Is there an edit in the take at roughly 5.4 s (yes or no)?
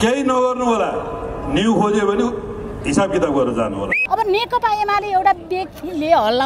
no